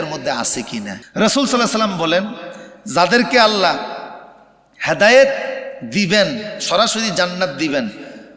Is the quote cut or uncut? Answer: cut